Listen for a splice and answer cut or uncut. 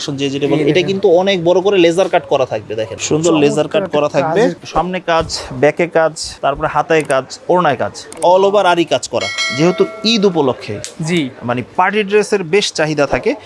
cut